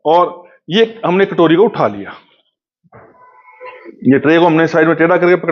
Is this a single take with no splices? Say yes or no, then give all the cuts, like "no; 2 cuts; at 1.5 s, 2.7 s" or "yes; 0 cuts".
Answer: yes; 0 cuts